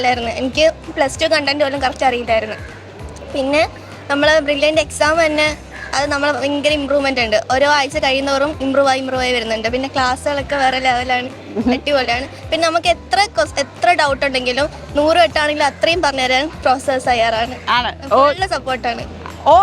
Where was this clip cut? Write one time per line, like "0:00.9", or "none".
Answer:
none

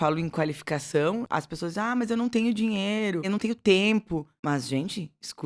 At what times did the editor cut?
0:01.2
0:03.3
0:04.3

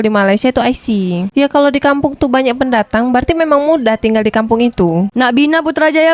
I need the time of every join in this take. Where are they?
0:01.3
0:05.1

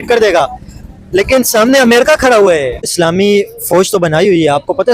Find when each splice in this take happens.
0:02.9

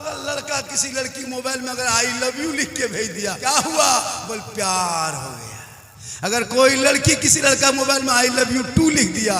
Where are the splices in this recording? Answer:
0:03.4

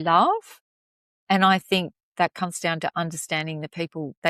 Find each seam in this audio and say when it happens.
none

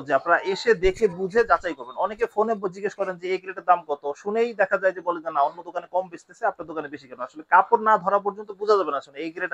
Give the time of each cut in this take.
none

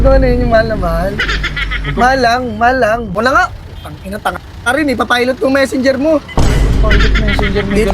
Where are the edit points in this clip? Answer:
0:03.1

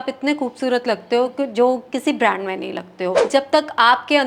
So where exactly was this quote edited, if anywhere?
0:03.2

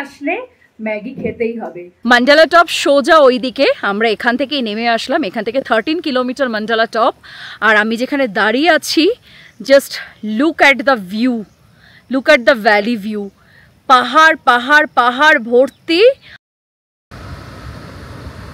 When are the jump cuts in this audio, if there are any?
0:01.8
0:17.1

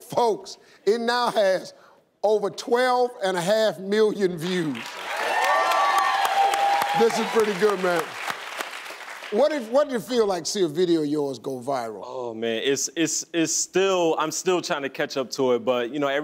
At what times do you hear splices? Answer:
none

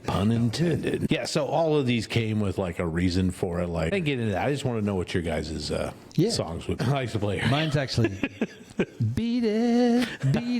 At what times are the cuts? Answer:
0:01.1
0:03.9
0:06.8

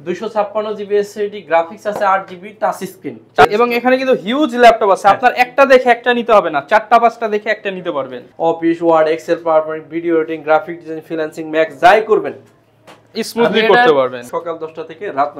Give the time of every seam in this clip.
0:03.4
0:08.2
0:14.2

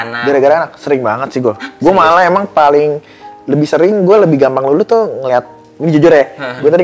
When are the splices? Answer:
none

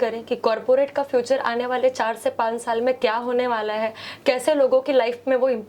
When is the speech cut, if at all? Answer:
none

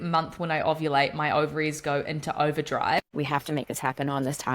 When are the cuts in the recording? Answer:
0:03.1

